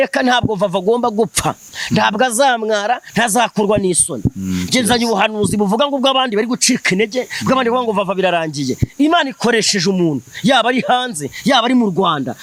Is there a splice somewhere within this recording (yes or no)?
no